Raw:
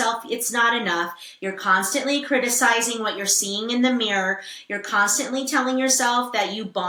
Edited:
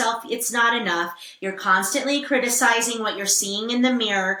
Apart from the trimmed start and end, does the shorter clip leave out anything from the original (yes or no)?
no